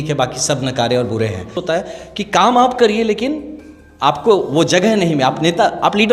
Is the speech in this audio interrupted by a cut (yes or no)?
yes